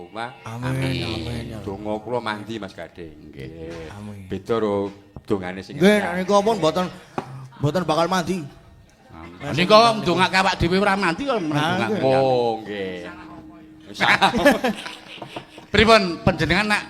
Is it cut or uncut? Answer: uncut